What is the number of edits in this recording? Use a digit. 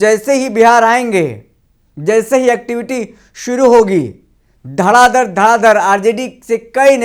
0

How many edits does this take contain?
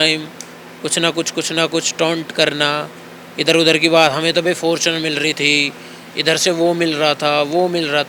0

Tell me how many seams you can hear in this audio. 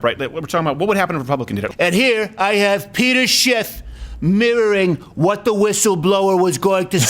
1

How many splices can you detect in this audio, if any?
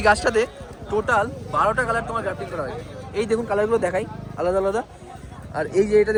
0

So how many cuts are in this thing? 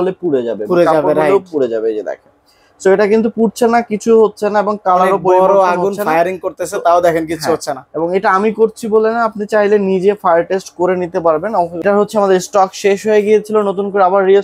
1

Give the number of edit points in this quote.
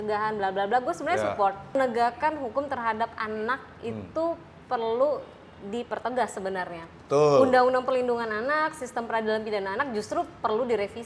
1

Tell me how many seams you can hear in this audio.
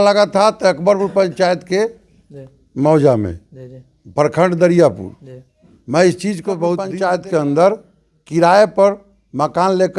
1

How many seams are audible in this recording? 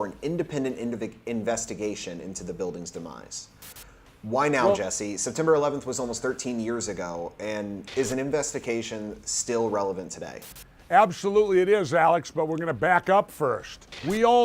0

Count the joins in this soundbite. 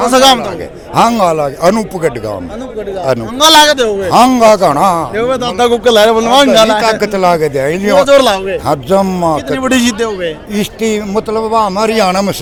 0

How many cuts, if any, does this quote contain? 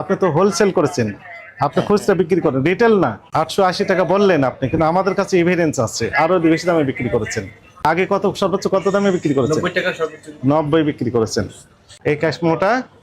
3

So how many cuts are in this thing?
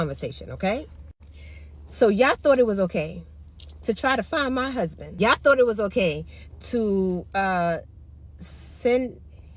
1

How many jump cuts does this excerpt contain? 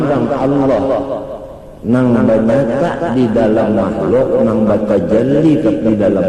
0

